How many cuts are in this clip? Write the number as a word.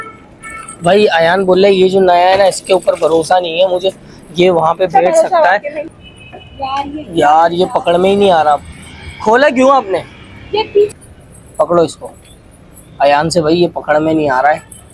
two